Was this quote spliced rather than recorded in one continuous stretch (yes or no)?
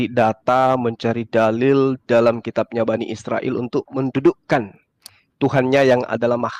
no